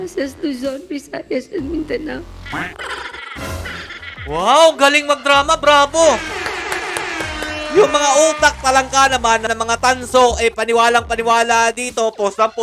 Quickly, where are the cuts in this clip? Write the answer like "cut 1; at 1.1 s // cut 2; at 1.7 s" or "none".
none